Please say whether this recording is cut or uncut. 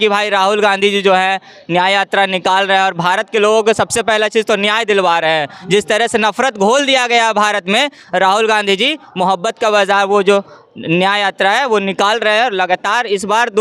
uncut